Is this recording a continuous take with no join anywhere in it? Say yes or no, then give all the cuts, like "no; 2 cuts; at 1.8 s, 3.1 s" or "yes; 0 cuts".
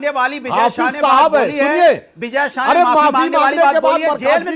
yes; 0 cuts